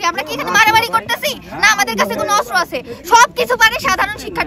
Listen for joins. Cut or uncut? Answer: uncut